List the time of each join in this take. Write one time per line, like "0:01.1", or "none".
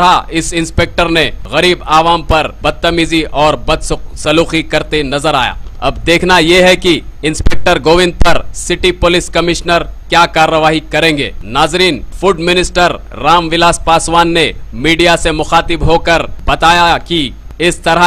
0:06.4